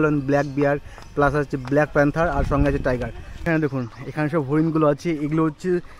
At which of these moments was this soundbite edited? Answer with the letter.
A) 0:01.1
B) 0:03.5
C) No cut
B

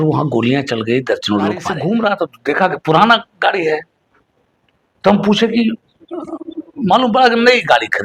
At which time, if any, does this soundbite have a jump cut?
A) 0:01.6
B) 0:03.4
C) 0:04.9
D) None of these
A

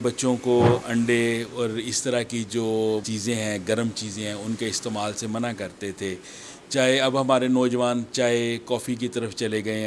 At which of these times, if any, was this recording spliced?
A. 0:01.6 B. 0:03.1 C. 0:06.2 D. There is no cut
B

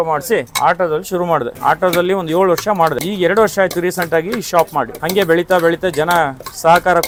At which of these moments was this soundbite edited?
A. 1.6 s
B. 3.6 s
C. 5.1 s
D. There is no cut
D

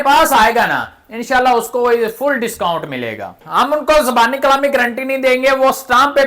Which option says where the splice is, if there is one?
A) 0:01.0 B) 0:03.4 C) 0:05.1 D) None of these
B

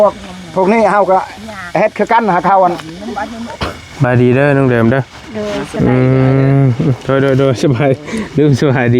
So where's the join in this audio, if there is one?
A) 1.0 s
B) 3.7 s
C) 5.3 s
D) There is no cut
B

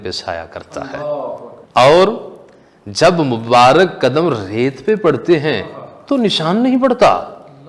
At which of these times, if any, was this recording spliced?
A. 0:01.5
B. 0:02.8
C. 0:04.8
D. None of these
A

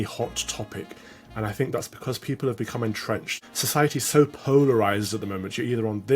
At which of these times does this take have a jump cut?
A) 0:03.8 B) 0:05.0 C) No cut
A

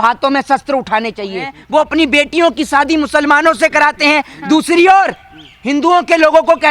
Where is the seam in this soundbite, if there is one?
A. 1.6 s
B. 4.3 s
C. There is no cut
A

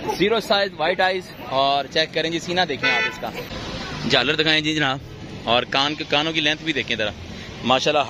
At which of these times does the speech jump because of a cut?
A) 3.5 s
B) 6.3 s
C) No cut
A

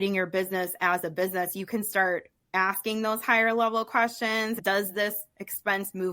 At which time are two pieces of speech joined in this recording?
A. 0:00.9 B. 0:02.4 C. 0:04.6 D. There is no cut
C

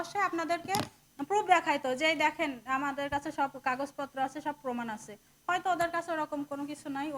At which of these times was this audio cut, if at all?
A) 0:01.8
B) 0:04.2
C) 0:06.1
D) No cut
D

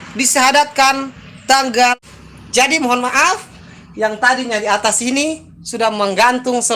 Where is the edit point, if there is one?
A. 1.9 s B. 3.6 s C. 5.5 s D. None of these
A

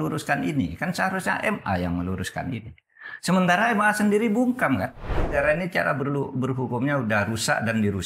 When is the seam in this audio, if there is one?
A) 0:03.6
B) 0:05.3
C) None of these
B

